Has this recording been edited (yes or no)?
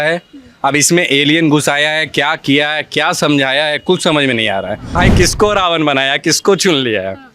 yes